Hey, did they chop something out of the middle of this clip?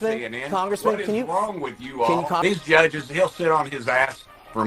yes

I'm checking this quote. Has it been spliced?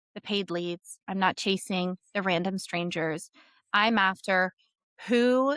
no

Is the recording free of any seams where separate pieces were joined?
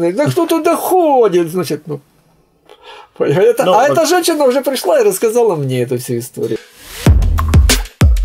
yes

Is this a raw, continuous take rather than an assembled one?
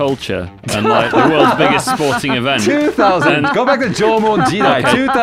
yes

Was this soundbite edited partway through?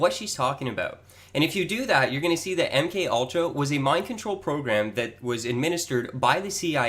yes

